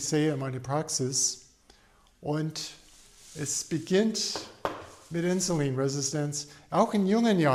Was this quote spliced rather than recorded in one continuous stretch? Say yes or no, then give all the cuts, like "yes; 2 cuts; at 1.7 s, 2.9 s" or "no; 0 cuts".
no; 0 cuts